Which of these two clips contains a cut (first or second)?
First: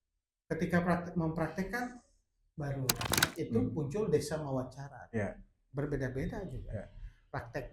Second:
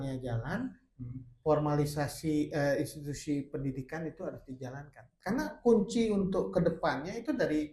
first